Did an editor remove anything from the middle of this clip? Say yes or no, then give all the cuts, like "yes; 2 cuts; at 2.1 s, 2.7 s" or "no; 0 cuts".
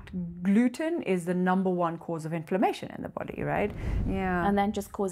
yes; 1 cut; at 3.9 s